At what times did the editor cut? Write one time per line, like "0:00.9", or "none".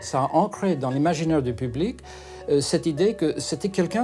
none